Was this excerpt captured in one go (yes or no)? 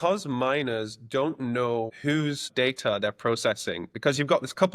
no